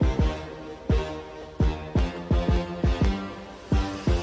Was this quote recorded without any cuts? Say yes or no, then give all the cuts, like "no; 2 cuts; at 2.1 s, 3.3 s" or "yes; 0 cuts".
yes; 0 cuts